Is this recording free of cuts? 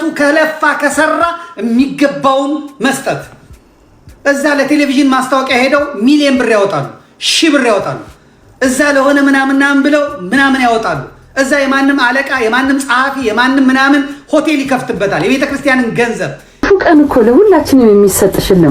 no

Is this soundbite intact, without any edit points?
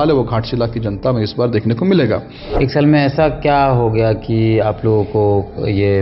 no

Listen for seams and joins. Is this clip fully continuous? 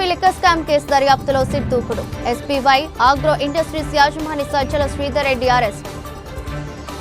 yes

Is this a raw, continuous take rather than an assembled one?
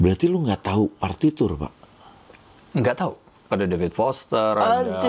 no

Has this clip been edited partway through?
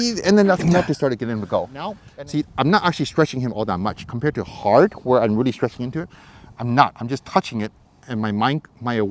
yes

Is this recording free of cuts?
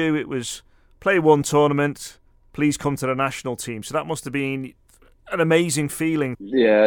yes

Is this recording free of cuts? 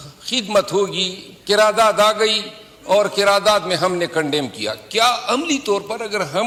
yes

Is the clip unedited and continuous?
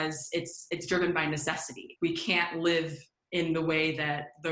no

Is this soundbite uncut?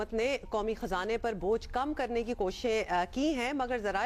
yes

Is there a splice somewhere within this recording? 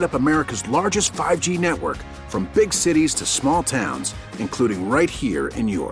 no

